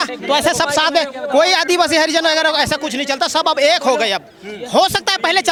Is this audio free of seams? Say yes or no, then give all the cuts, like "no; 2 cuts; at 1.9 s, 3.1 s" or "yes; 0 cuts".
yes; 0 cuts